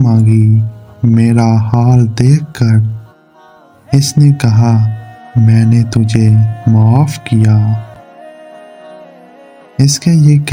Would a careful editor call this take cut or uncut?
uncut